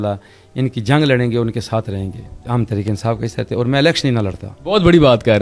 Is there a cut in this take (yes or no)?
yes